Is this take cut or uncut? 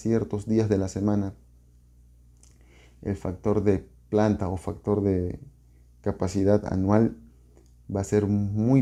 uncut